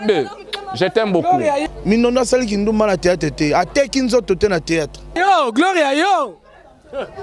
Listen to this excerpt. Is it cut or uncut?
cut